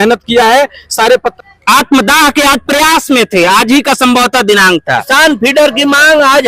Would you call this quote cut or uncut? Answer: cut